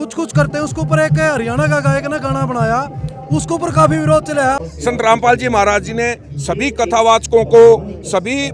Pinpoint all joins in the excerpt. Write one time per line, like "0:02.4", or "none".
0:04.7